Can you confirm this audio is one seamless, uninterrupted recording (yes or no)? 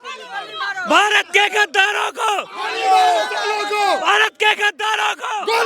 yes